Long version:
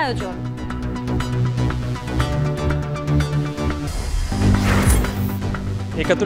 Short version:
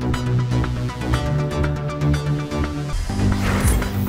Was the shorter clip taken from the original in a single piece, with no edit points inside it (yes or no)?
no